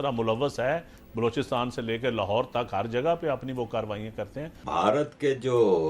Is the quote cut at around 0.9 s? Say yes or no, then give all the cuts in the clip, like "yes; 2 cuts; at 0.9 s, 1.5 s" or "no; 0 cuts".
no; 1 cut; at 4.6 s